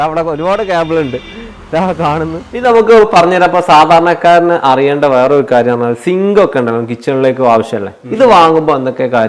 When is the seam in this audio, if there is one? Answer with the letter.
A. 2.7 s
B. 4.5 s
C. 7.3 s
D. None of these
A